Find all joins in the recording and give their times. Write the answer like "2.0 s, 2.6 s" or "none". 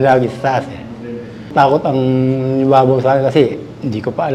1.5 s